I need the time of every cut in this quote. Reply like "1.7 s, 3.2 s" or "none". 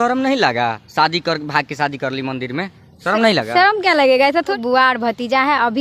4.6 s